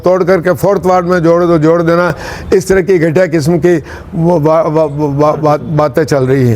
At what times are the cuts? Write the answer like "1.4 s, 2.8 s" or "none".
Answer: none